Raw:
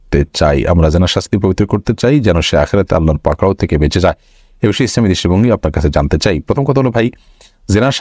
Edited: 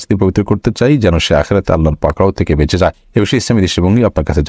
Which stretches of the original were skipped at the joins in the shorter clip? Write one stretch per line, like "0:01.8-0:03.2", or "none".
0:04.2-0:04.5